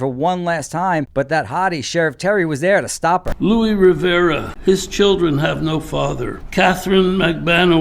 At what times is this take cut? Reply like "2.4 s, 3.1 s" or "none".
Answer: 1.1 s, 3.3 s, 4.5 s, 6.4 s